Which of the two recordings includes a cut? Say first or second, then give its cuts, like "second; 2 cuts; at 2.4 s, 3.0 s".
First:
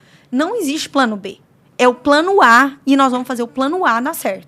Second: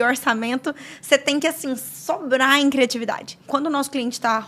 second; 1 cut; at 3.4 s